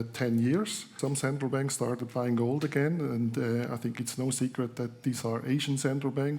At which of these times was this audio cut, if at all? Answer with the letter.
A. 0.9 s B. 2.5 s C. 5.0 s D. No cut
A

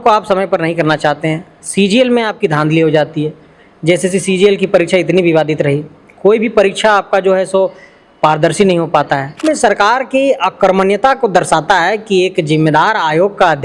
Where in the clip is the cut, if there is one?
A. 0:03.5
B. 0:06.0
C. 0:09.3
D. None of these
C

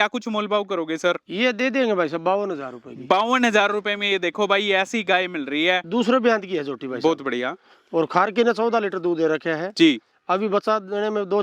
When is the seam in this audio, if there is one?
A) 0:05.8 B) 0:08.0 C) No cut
A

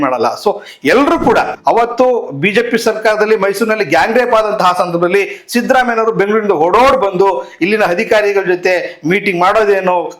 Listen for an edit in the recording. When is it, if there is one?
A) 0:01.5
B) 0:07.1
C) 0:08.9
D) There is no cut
A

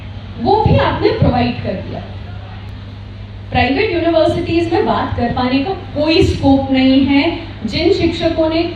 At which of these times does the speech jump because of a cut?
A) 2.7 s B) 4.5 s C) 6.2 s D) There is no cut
A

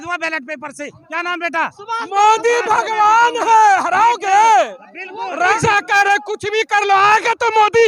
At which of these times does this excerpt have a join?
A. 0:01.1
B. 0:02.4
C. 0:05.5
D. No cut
C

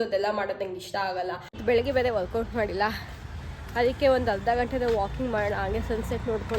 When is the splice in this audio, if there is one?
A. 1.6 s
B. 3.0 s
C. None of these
A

